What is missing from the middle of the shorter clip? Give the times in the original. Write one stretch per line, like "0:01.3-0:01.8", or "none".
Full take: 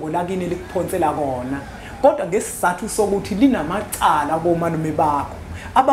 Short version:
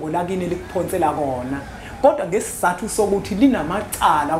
none